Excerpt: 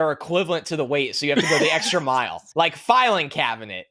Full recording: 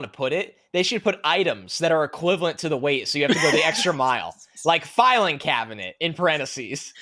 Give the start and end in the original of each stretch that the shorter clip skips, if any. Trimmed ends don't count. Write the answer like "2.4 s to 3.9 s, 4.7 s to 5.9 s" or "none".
4.3 s to 4.5 s